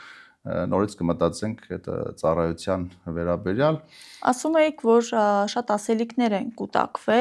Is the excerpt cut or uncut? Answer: uncut